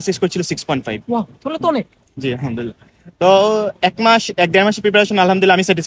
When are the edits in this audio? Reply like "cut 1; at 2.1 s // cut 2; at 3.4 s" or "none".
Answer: none